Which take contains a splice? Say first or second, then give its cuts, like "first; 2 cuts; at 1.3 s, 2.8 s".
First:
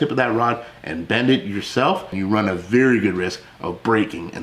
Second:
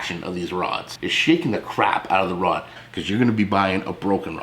second; 2 cuts; at 1.0 s, 2.7 s